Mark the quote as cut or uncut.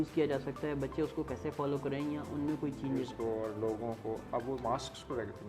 cut